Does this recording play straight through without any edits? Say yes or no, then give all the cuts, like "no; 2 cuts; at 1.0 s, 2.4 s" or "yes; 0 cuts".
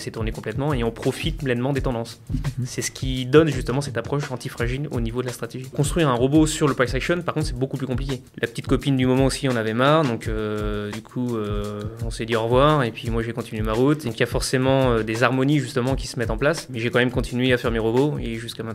no; 4 cuts; at 5.7 s, 8.2 s, 14.1 s, 16.7 s